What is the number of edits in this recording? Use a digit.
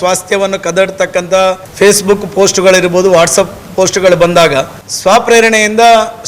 2